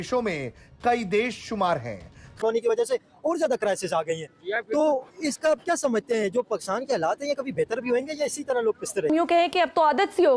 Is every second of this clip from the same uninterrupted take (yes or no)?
no